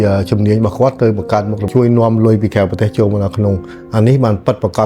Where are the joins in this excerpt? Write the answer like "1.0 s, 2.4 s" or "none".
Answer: 1.6 s